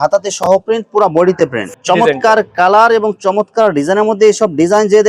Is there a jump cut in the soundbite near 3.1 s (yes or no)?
no